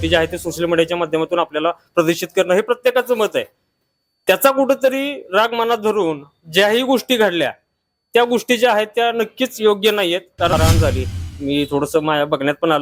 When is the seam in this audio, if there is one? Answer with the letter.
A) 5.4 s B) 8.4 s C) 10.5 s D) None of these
C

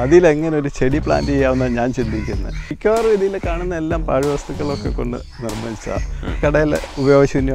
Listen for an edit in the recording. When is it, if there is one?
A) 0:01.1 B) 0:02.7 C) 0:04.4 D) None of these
B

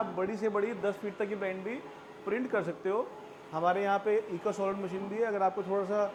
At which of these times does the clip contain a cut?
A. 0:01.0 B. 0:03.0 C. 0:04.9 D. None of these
D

